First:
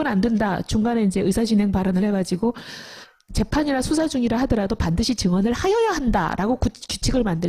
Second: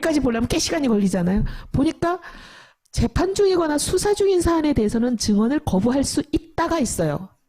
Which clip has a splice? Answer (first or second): second